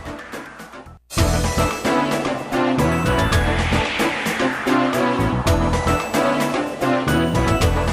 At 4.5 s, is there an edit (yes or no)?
no